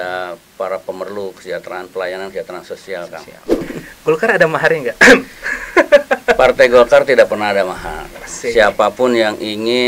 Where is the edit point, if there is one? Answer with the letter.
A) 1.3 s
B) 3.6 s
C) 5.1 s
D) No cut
B